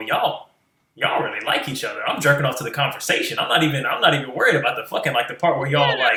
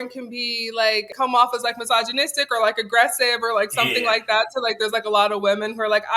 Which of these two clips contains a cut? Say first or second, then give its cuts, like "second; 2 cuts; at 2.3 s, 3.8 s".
second; 1 cut; at 1.1 s